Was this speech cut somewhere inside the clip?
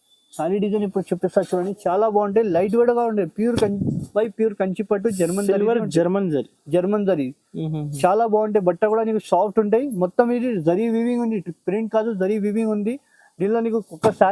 no; 0 cuts

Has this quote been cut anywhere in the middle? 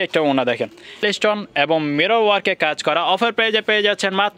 yes; 1 cut; at 1.0 s

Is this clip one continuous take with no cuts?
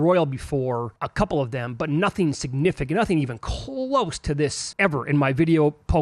no; 2 cuts; at 1.0 s, 4.6 s

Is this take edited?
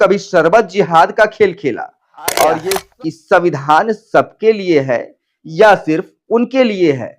yes; 1 cut; at 2.8 s

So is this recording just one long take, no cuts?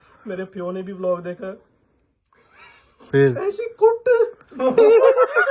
yes; 0 cuts

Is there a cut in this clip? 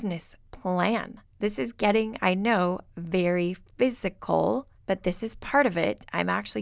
yes; 2 cuts; at 1.2 s, 4.7 s

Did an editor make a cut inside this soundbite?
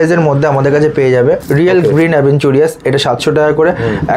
yes; 1 cut; at 1.4 s

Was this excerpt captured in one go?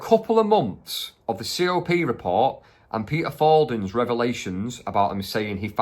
yes; 0 cuts

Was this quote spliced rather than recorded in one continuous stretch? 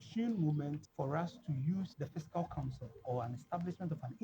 yes; 2 cuts; at 0.9 s, 1.9 s

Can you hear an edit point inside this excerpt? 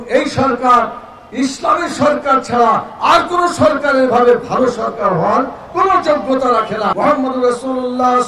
yes; 1 cut; at 6.9 s

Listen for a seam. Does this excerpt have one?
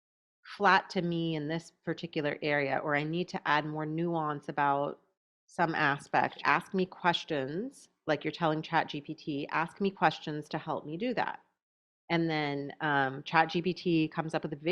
yes; 1 cut; at 6.4 s

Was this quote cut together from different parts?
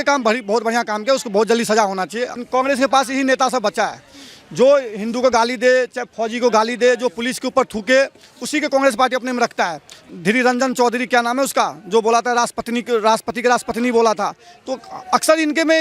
yes; 2 cuts; at 2.4 s, 10.0 s

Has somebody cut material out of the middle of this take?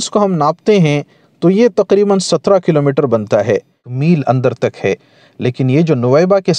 yes; 1 cut; at 3.9 s

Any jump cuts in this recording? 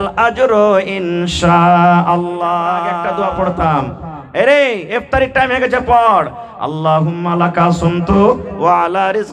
yes; 1 cut; at 3.0 s

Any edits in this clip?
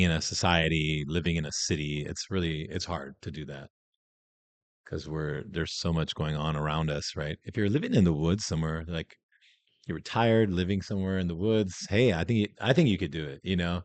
no; 0 cuts

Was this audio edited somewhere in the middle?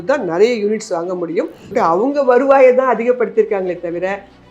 yes; 1 cut; at 1.7 s

